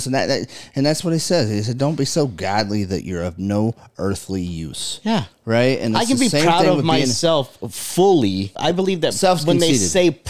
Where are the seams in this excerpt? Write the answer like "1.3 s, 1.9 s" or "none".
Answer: 8.5 s